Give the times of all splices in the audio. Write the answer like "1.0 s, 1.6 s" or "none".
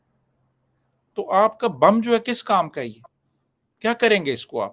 none